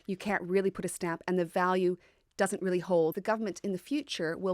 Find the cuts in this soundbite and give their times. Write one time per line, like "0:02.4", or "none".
0:03.1